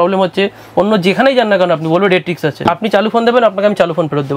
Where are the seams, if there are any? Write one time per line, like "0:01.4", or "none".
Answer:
0:02.7